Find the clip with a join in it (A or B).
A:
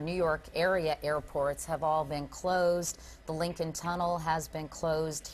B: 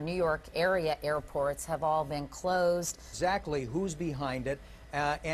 A